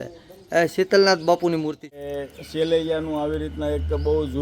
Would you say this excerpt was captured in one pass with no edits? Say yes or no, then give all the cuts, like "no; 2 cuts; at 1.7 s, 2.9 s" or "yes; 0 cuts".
no; 1 cut; at 2.0 s